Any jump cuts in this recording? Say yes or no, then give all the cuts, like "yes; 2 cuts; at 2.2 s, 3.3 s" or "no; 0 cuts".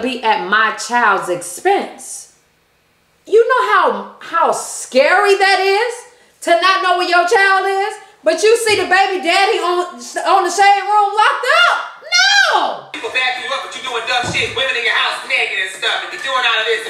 yes; 1 cut; at 12.9 s